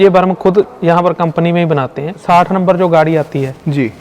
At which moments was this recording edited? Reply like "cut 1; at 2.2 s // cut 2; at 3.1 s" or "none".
cut 1; at 2.2 s

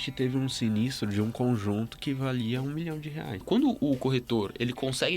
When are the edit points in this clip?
cut 1; at 3.4 s

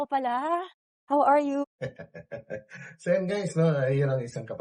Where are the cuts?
none

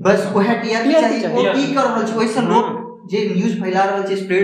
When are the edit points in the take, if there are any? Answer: none

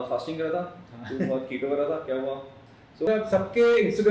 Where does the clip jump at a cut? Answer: cut 1; at 3.1 s

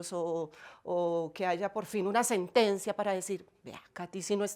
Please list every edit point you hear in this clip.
none

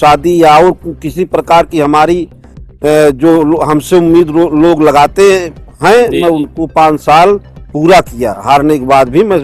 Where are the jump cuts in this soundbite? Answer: none

